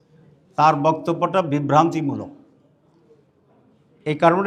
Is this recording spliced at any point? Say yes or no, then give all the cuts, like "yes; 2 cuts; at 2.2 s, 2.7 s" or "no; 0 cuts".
no; 0 cuts